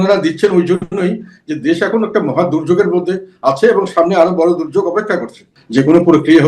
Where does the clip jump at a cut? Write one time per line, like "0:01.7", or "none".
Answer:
0:05.5